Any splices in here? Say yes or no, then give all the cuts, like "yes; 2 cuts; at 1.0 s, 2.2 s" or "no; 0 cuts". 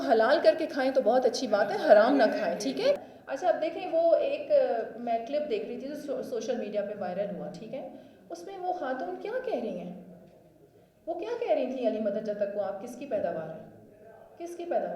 yes; 1 cut; at 3.1 s